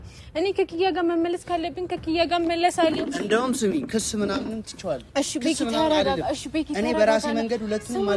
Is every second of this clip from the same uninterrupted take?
yes; 0 cuts

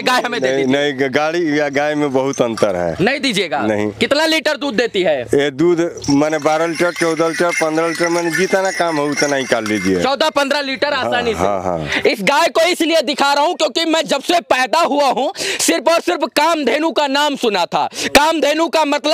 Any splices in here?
no; 0 cuts

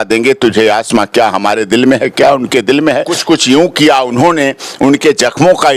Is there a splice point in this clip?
yes; 1 cut; at 3.1 s

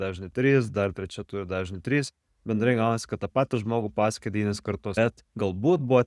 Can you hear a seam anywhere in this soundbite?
yes; 1 cut; at 5.0 s

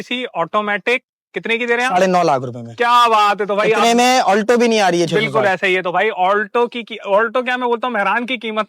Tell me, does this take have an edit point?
no; 0 cuts

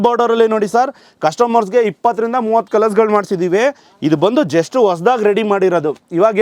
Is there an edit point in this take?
no; 0 cuts

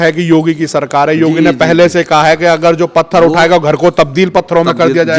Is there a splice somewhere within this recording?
no; 0 cuts

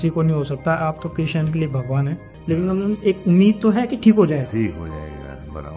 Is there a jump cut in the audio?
yes; 1 cut; at 2.3 s

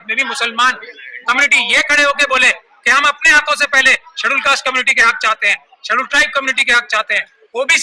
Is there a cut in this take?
no; 0 cuts

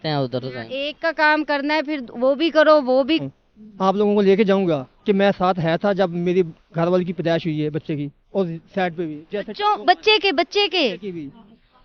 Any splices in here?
yes; 2 cuts; at 3.2 s, 8.2 s

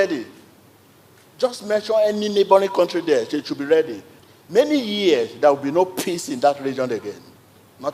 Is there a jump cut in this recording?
no; 0 cuts

